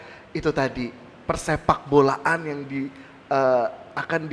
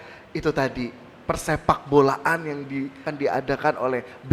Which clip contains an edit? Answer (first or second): second